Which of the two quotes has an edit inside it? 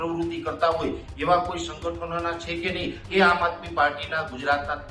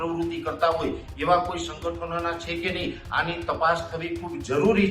first; 1 cut; at 3.0 s

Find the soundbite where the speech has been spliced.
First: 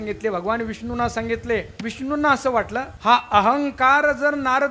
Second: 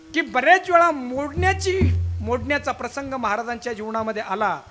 first; 2 cuts; at 1.8 s, 2.9 s

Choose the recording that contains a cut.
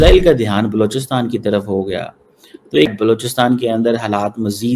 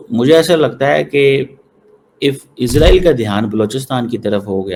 first; 1 cut; at 2.9 s

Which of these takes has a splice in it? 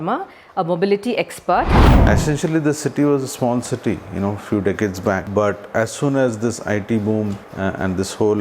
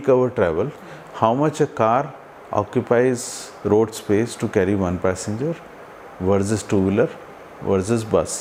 first; 3 cuts; at 1.8 s, 5.3 s, 7.5 s

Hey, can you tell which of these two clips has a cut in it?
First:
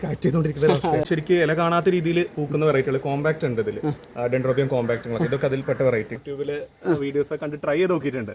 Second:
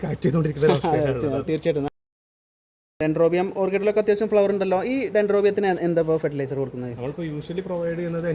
first; 2 cuts; at 1.0 s, 6.1 s

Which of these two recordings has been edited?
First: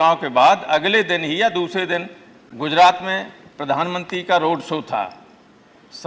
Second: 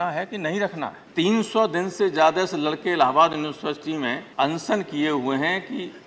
second; 2 cuts; at 1.0 s, 4.2 s

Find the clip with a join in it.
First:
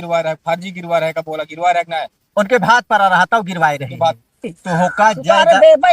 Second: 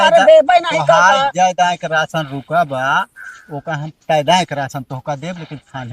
first; 1 cut; at 4.4 s

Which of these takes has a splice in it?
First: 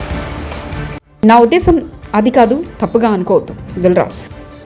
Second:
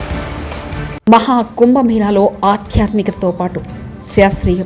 first; 1 cut; at 0.9 s

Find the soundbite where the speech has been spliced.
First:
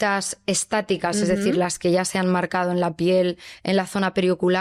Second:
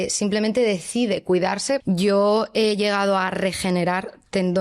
second; 1 cut; at 1.8 s

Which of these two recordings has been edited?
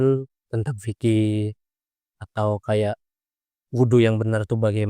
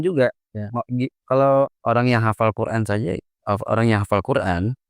second; 1 cut; at 1.8 s

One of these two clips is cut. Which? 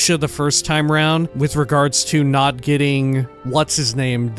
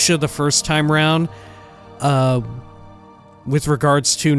first; 2 cuts; at 1.3 s, 3.4 s

